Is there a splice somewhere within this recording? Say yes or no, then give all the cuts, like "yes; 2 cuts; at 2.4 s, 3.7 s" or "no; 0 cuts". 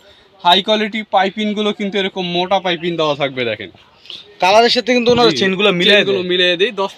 no; 0 cuts